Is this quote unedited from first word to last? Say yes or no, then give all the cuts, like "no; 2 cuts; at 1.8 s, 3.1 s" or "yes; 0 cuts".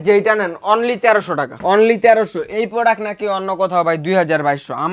no; 1 cut; at 1.5 s